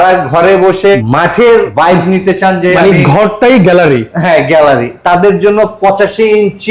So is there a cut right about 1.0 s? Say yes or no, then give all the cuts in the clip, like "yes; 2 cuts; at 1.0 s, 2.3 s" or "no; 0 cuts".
yes; 2 cuts; at 1.0 s, 1.7 s